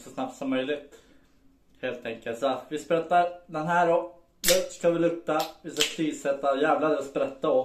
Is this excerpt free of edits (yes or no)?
yes